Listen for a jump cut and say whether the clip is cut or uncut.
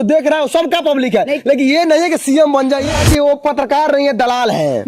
cut